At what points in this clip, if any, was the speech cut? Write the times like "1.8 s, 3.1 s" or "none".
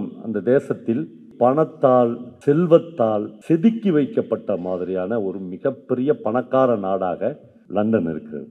1.2 s, 2.3 s, 3.3 s, 7.5 s